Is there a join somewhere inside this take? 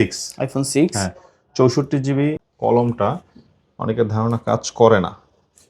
yes; 1 cut; at 2.4 s

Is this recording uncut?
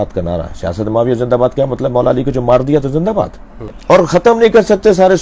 no; 1 cut; at 3.7 s

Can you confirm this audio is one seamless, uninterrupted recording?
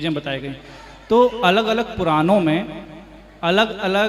yes; 0 cuts

